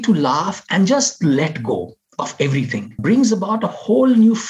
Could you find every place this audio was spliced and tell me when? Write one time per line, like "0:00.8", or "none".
0:03.0